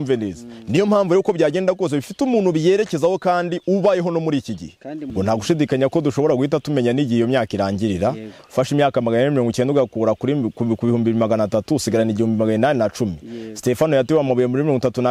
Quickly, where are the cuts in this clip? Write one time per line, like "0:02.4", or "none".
0:05.1